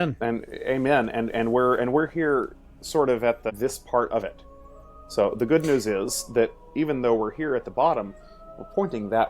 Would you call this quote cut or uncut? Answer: cut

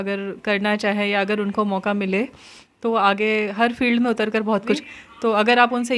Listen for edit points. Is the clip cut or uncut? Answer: cut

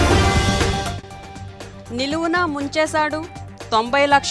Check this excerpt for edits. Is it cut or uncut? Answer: cut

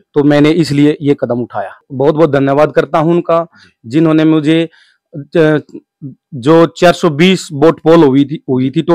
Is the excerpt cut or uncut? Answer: cut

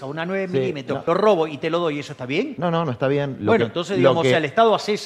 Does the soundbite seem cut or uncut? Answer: cut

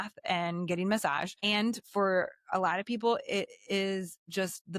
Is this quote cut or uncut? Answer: cut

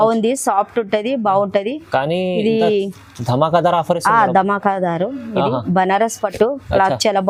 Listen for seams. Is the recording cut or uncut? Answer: uncut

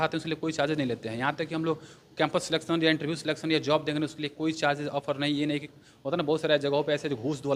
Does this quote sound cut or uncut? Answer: uncut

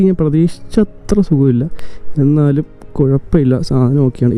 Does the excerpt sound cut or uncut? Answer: uncut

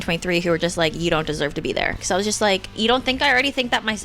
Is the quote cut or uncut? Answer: cut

